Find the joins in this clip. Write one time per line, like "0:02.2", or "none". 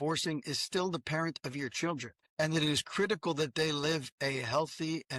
0:02.2